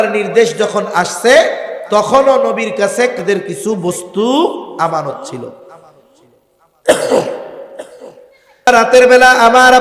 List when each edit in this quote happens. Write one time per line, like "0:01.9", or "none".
0:03.2
0:08.7